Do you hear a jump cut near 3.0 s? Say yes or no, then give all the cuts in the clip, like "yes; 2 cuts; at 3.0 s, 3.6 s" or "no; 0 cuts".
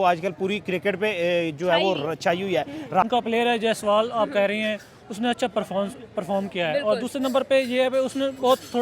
yes; 1 cut; at 3.0 s